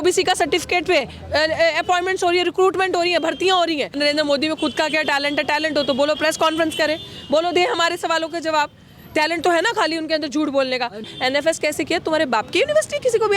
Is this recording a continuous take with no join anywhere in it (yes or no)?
no